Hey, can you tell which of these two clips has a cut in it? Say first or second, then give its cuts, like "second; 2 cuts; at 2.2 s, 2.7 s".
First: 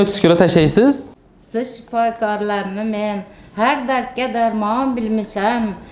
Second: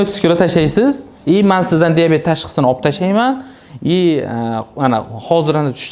first; 1 cut; at 1.1 s